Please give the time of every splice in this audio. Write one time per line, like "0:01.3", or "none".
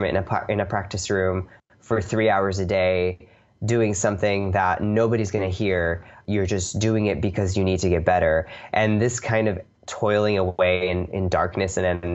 0:06.1